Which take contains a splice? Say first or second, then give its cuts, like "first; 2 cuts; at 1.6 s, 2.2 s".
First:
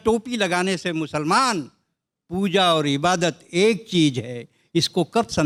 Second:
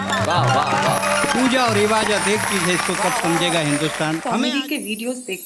second; 1 cut; at 4.3 s